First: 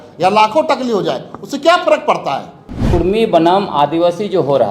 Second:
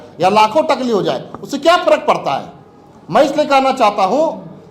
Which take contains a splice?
first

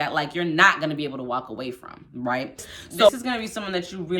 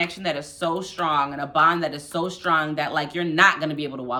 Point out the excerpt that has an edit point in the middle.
first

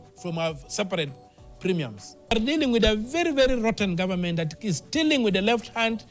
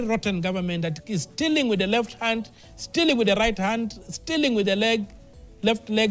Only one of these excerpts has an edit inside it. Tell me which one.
first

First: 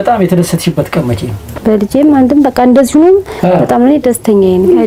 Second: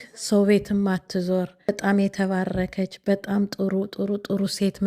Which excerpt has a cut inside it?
second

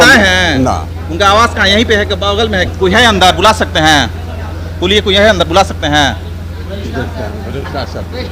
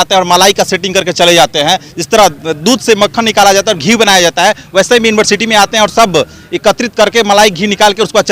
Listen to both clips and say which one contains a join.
first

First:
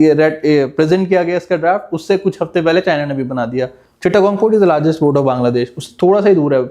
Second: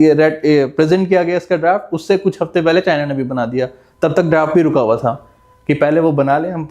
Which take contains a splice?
first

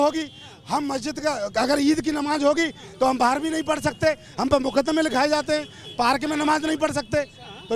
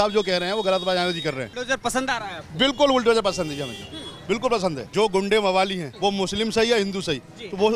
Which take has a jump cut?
second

